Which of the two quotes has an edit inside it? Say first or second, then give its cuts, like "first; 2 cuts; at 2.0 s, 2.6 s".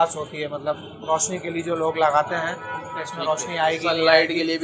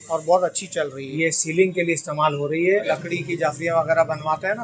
second; 2 cuts; at 1.1 s, 2.8 s